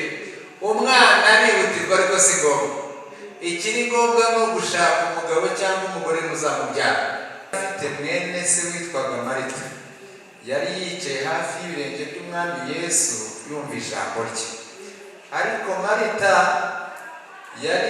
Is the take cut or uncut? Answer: cut